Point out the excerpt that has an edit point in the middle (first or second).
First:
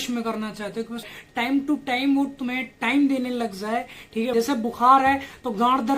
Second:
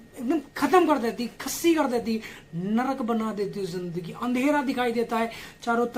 first